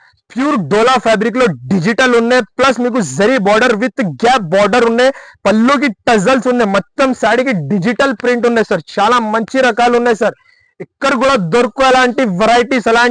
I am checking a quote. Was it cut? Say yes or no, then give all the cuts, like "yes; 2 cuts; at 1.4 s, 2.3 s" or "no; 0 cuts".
no; 0 cuts